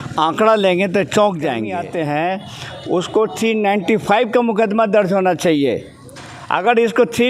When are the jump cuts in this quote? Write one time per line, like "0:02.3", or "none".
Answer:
0:01.7